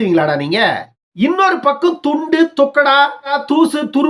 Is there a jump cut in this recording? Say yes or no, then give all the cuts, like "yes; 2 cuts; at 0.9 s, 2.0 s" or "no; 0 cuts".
yes; 1 cut; at 1.0 s